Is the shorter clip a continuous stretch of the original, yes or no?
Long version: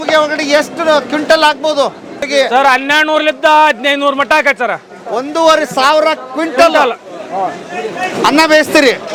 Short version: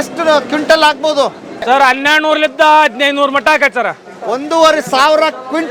no